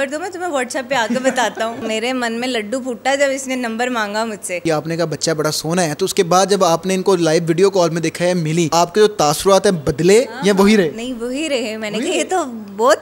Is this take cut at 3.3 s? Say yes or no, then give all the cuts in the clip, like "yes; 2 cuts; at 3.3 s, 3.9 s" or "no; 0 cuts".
no; 3 cuts; at 1.8 s, 4.6 s, 8.7 s